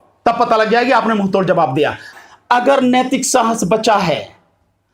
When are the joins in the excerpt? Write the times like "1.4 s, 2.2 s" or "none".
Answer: 2.1 s